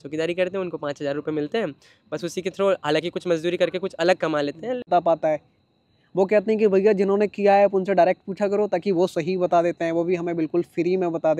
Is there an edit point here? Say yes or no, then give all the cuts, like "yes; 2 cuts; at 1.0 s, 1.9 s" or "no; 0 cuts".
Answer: yes; 1 cut; at 4.9 s